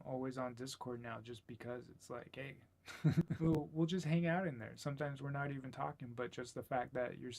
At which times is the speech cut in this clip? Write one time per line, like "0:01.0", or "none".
0:03.6